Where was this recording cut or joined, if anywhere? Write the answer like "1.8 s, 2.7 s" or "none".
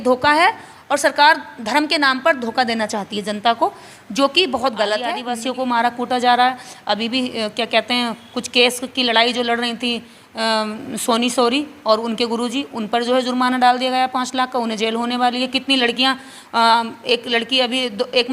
5.2 s